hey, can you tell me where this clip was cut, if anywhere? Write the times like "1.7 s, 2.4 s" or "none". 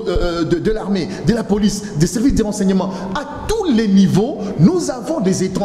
none